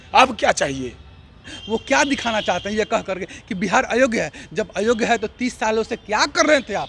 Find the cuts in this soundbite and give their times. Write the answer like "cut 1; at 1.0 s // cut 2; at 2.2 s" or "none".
cut 1; at 1.5 s